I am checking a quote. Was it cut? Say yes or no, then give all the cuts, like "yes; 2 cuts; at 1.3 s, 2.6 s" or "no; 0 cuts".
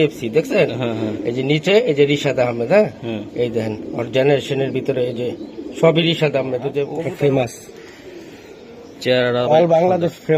yes; 1 cut; at 7.1 s